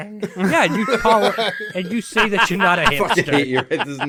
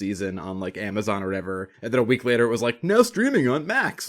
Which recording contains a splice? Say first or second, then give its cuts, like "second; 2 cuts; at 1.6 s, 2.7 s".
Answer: second; 1 cut; at 1.7 s